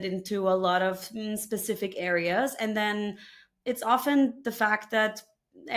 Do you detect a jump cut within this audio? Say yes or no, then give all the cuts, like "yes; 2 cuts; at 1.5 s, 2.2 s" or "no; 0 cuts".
no; 0 cuts